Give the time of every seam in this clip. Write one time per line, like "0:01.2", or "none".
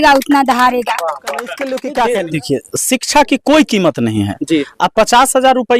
0:01.6